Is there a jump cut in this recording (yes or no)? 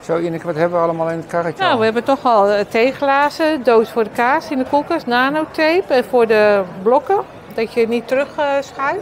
no